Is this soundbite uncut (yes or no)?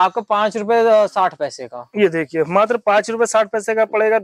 yes